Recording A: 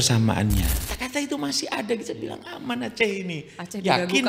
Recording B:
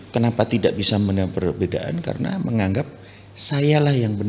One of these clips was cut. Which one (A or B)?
A